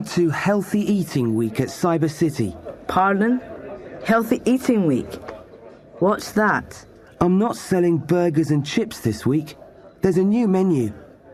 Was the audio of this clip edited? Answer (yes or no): no